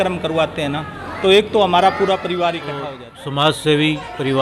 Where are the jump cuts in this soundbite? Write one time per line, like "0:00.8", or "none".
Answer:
0:03.0